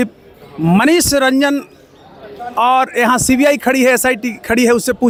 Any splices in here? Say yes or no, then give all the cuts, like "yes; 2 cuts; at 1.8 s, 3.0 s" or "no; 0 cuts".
no; 0 cuts